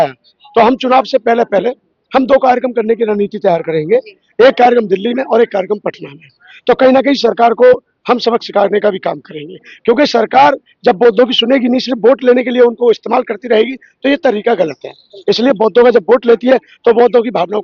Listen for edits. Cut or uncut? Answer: uncut